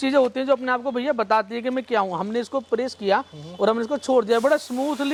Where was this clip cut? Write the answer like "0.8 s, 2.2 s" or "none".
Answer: none

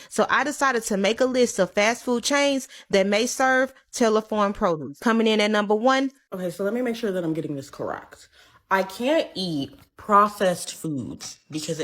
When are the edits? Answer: 6.3 s

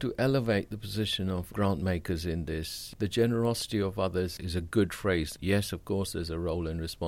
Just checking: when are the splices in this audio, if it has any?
1.5 s, 2.9 s, 5.3 s

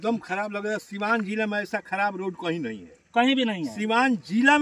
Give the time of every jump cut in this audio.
none

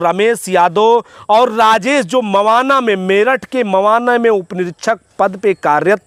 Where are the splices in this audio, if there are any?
none

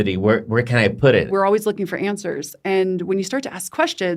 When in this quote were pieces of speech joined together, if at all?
1.3 s

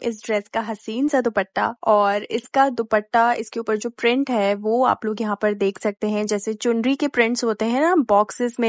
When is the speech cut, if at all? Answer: none

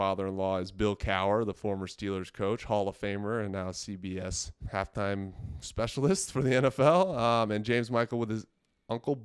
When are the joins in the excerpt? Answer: 4.5 s

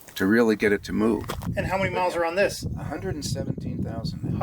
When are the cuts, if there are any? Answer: 1.4 s, 2.7 s

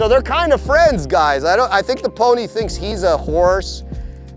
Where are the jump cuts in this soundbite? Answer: 2.8 s

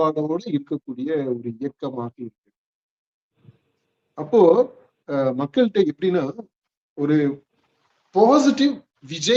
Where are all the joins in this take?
none

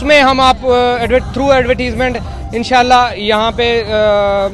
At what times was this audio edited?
none

